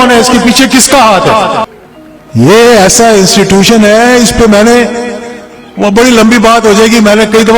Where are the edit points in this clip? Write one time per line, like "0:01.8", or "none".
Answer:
0:01.7